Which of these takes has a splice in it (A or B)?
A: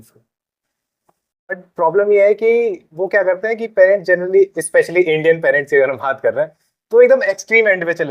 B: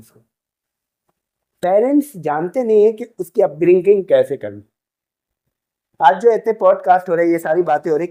A